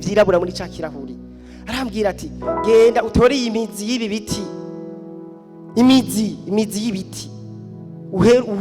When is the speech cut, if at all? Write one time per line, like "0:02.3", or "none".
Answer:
none